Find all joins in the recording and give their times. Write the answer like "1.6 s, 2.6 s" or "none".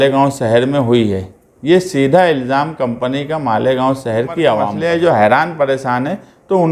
4.7 s